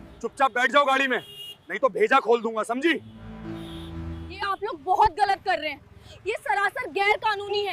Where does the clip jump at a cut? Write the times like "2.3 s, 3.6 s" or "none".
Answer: none